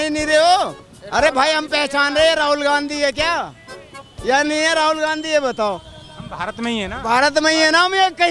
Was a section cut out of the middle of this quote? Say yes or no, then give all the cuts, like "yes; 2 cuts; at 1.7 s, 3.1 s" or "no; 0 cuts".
no; 0 cuts